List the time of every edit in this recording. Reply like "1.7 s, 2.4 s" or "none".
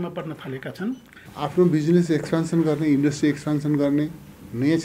1.2 s